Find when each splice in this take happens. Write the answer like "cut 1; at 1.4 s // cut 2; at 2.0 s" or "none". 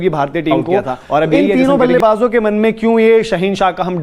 cut 1; at 1.4 s

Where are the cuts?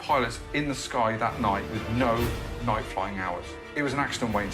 cut 1; at 1.7 s // cut 2; at 3.6 s

